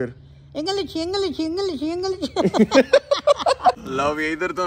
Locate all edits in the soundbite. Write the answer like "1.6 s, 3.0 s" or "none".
3.8 s

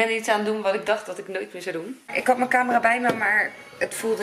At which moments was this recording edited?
2.1 s

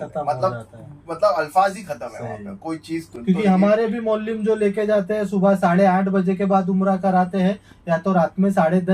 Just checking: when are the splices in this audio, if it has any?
3.1 s

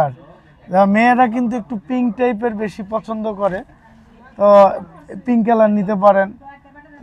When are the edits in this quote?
none

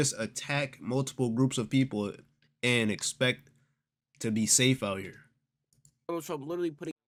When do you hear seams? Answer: none

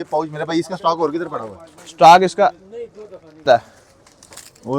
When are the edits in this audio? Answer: 3.4 s

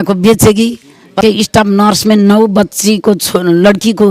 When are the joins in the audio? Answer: 1.2 s

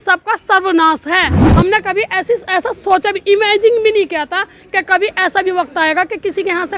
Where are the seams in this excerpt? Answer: 1.4 s

